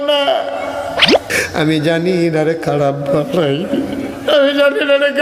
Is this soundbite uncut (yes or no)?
no